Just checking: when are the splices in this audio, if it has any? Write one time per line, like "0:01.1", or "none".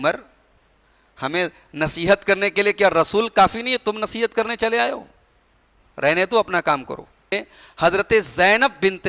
0:07.3

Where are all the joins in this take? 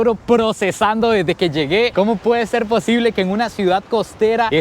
0:01.9

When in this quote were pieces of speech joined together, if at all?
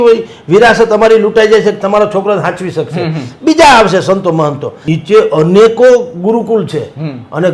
0:04.9

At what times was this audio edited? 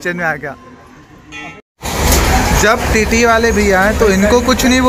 0:01.7

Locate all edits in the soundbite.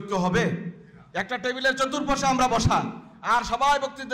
none

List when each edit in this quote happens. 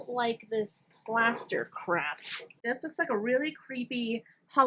0:02.6

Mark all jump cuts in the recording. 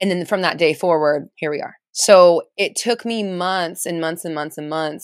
none

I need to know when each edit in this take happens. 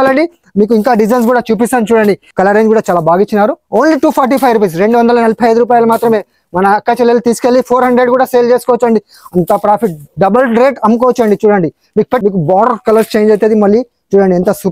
0:02.3
0:12.2

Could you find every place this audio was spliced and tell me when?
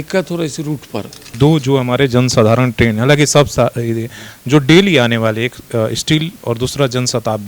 0:01.3

